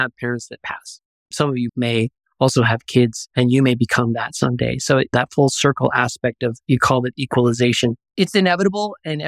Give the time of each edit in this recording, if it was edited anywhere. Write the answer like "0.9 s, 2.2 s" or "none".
8.0 s